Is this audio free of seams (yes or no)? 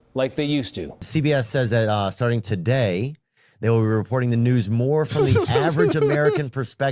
no